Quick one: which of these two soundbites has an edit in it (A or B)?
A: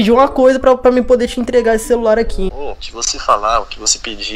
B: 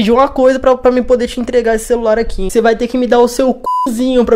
B